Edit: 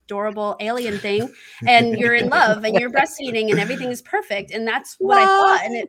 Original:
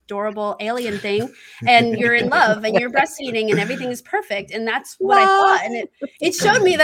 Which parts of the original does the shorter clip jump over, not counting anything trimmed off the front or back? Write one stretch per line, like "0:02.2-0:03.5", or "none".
none

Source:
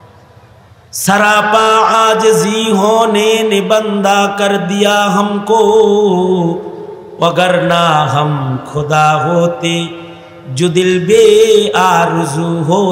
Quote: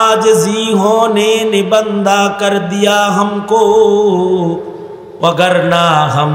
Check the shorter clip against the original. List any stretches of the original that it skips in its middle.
none

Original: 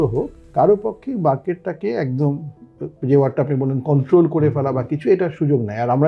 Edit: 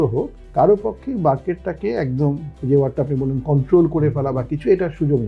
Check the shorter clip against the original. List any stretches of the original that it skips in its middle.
0:02.5-0:02.9

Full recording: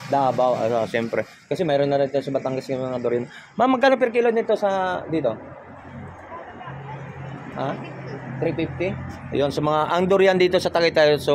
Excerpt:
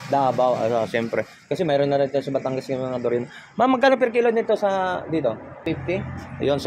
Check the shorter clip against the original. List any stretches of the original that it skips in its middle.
0:05.6-0:08.5

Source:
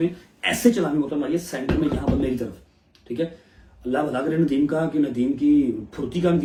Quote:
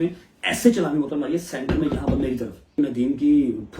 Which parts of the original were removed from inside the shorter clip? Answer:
0:02.7-0:04.9

